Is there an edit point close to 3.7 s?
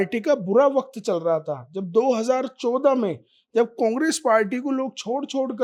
no; 0 cuts

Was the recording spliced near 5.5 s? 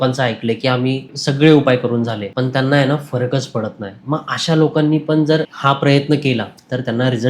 yes; 3 cuts; at 1.1 s, 2.2 s, 5.5 s

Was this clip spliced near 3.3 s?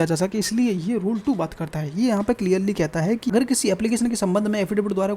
yes; 1 cut; at 3.3 s

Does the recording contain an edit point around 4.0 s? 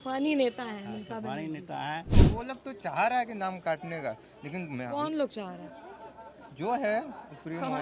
no; 1 cut; at 2.2 s

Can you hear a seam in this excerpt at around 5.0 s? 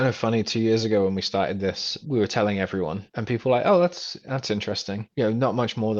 yes; 3 cuts; at 2.0 s, 3.1 s, 5.0 s

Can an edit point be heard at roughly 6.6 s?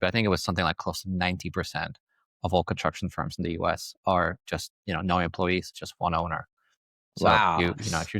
no; 0 cuts

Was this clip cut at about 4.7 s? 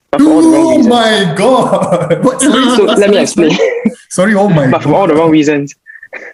no; 0 cuts

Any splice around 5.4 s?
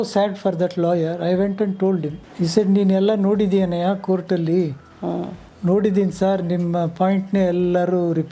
no; 1 cut; at 2.2 s

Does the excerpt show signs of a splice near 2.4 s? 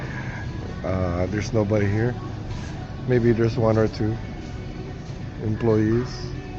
no; 0 cuts

